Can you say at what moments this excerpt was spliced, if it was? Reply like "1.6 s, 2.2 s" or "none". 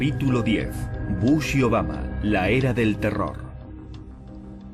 3.7 s